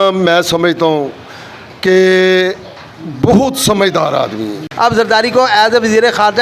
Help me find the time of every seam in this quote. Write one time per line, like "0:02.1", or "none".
0:04.6